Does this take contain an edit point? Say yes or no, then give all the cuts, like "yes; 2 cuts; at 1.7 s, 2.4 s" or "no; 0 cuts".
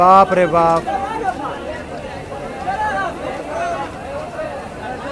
no; 0 cuts